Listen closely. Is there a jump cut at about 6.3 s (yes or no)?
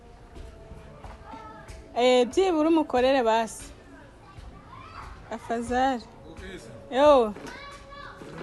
no